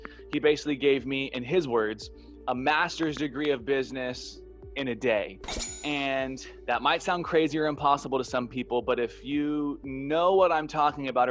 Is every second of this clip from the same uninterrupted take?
yes; 0 cuts

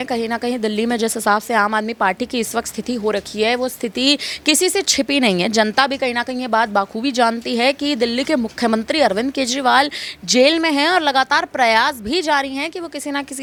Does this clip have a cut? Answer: no; 0 cuts

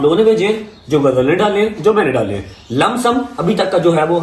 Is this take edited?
no; 0 cuts

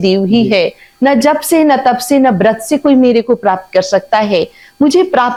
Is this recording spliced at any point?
no; 0 cuts

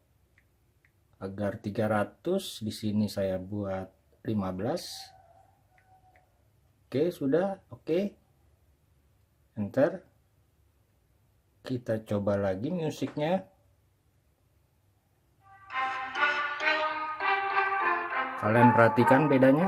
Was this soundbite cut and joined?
no; 0 cuts

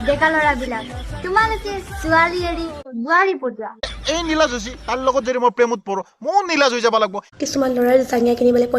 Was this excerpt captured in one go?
no; 2 cuts; at 3.9 s, 7.3 s

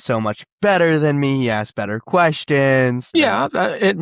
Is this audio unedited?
no; 1 cut; at 3.0 s

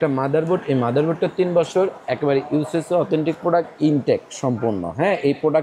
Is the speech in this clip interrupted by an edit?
no; 0 cuts

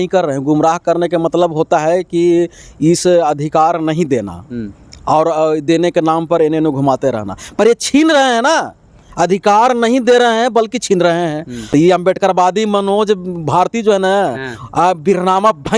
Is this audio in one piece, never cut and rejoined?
no; 1 cut; at 11.6 s

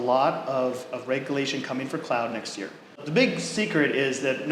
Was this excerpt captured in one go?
no; 1 cut; at 2.9 s

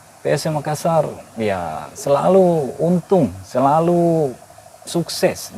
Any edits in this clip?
no; 0 cuts

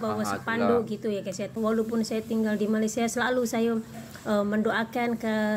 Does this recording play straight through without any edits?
no; 1 cut; at 1.5 s

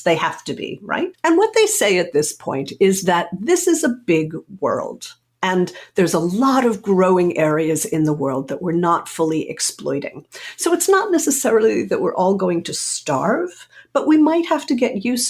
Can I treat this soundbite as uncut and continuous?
no; 1 cut; at 1.1 s

